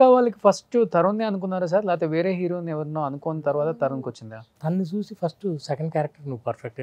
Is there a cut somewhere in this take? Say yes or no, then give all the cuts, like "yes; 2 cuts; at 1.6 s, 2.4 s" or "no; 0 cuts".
yes; 1 cut; at 4.5 s